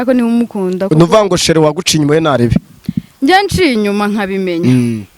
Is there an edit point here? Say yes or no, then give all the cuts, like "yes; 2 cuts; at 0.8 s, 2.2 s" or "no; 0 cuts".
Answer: no; 0 cuts